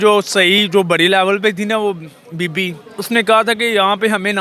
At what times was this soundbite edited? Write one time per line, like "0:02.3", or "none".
none